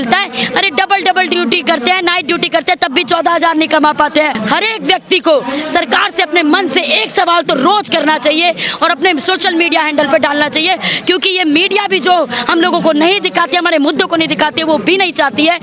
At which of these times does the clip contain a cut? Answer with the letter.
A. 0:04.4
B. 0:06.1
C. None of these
A